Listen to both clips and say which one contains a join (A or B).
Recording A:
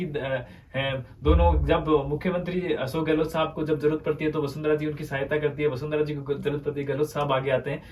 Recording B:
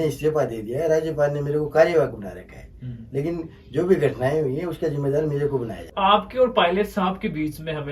B